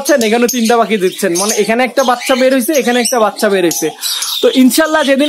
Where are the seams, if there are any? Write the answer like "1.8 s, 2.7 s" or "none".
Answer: none

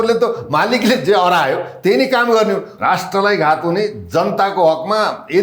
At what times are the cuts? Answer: 2.7 s

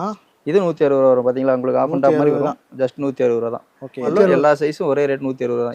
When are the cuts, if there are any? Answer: 4.1 s

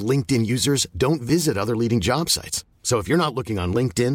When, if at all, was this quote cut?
none

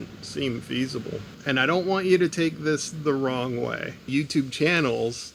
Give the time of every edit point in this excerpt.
1.3 s, 3.9 s

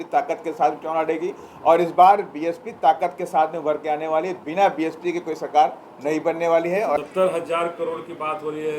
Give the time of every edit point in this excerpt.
7.0 s

